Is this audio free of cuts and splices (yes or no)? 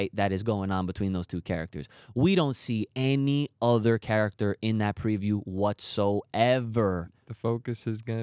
yes